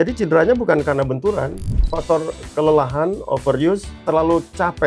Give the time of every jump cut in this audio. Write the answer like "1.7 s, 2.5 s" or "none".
1.9 s, 4.0 s